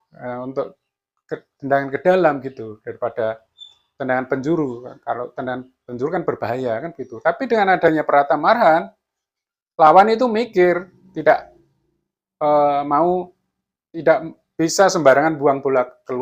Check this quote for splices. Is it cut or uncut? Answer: uncut